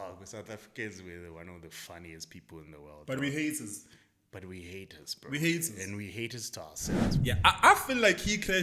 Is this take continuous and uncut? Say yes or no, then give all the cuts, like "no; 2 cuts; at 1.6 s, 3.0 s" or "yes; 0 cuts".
no; 1 cut; at 7.1 s